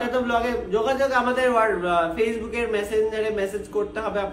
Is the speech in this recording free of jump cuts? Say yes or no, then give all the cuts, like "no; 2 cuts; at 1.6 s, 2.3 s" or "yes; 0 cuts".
yes; 0 cuts